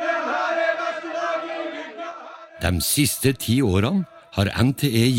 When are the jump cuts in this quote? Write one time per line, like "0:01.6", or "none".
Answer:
none